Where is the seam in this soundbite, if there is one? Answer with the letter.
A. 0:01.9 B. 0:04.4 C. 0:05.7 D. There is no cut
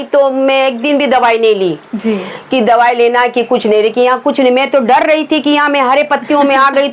D